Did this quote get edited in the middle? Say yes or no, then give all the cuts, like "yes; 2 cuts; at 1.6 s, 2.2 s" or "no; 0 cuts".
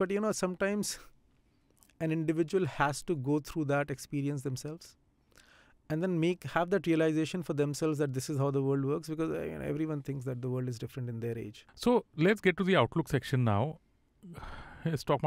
yes; 1 cut; at 11.6 s